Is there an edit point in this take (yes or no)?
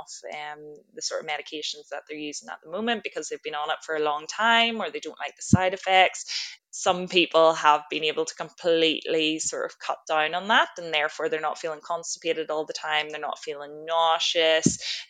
yes